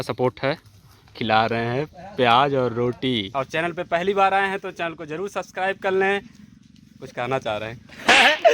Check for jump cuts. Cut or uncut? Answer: cut